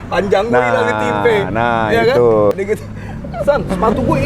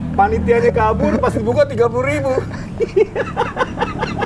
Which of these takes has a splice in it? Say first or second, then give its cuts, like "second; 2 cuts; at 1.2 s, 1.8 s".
first; 1 cut; at 2.5 s